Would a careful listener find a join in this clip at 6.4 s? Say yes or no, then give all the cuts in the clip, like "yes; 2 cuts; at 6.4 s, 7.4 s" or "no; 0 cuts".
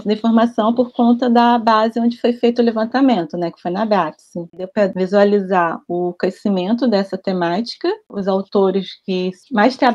no; 2 cuts; at 4.8 s, 8.1 s